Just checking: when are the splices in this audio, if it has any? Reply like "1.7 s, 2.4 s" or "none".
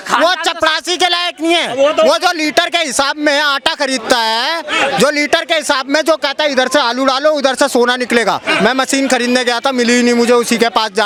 none